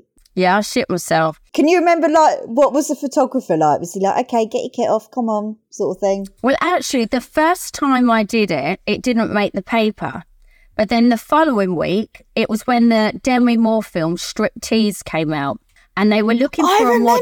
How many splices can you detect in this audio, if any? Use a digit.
1